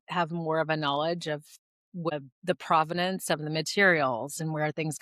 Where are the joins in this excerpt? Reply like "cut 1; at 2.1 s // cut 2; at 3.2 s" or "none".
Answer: cut 1; at 2.1 s